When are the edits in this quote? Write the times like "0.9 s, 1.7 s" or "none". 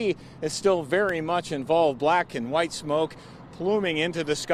none